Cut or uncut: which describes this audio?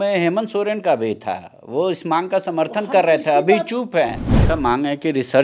cut